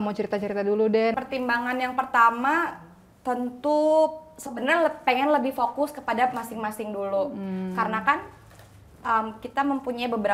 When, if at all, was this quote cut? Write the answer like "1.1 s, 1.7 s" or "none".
1.1 s